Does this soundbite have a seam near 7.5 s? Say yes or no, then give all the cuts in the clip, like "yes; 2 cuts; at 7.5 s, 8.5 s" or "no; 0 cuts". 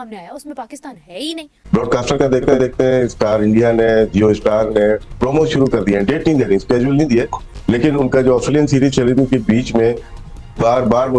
no; 1 cut; at 1.5 s